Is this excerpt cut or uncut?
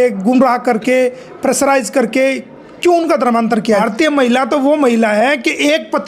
cut